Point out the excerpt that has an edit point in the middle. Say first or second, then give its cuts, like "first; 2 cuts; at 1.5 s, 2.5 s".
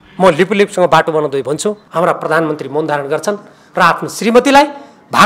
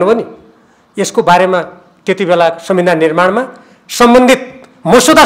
first; 1 cut; at 1.8 s